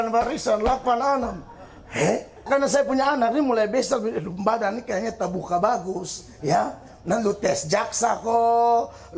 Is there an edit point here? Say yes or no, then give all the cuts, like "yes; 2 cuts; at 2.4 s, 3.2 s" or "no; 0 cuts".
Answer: yes; 1 cut; at 2.4 s